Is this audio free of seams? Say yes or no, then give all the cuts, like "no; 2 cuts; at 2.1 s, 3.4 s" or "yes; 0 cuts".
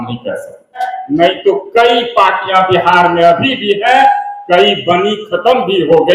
no; 1 cut; at 0.9 s